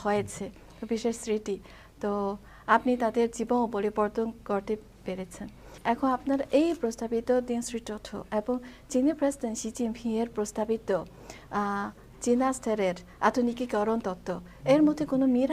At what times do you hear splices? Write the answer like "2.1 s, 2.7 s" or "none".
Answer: 5.7 s